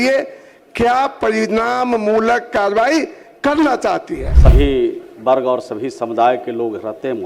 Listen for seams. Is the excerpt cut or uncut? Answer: cut